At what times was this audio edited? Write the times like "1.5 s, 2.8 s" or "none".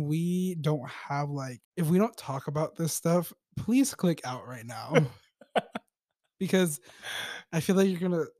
1.6 s